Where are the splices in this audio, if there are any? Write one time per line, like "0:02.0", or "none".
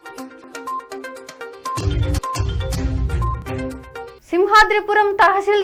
none